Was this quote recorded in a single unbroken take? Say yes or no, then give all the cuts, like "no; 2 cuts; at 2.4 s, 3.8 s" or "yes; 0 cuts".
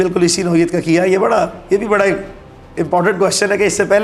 yes; 0 cuts